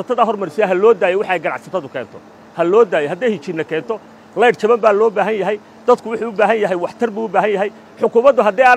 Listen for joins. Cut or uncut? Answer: uncut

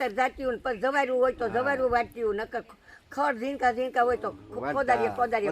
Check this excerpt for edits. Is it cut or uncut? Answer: uncut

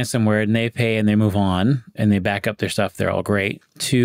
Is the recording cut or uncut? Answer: cut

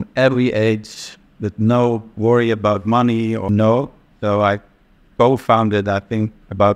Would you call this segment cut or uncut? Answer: cut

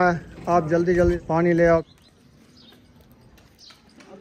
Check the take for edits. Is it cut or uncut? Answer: cut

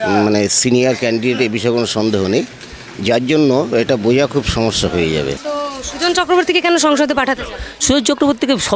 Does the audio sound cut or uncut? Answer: uncut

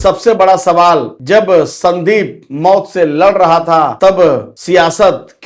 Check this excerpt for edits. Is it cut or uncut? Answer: cut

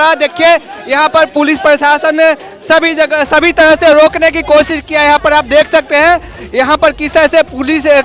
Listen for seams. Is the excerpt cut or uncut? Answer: uncut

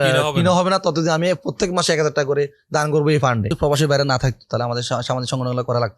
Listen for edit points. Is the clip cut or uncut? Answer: cut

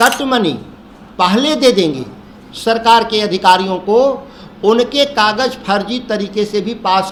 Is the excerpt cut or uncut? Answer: uncut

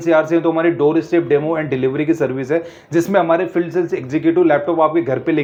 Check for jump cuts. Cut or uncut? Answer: uncut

